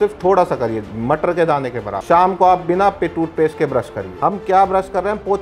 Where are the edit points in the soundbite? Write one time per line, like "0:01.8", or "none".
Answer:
0:02.0
0:04.0